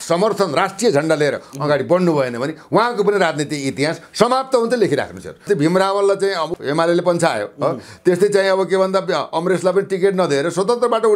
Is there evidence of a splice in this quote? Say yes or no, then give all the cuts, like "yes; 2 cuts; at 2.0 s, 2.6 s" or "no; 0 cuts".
yes; 1 cut; at 5.4 s